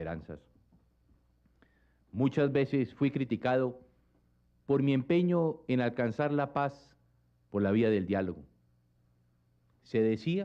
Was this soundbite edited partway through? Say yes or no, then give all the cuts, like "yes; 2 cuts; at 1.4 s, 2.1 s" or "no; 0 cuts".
yes; 1 cut; at 8.1 s